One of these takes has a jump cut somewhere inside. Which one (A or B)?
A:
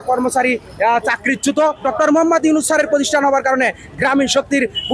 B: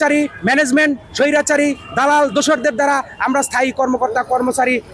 A